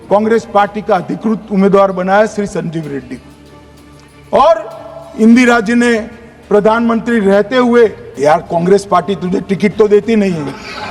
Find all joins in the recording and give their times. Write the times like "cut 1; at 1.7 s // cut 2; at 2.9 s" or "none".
cut 1; at 8.1 s